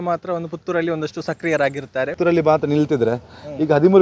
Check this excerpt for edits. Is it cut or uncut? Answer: cut